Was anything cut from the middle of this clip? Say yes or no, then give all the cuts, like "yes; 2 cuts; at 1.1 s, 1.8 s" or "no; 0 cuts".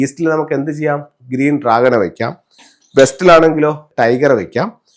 yes; 1 cut; at 3.8 s